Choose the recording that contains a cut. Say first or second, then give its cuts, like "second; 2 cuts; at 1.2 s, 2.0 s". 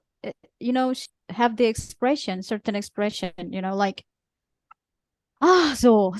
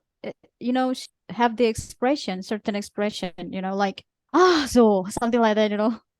second; 1 cut; at 4.1 s